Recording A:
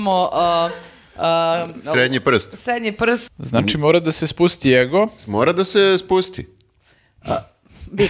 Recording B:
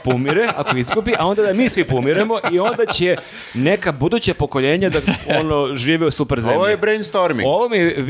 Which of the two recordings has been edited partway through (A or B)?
A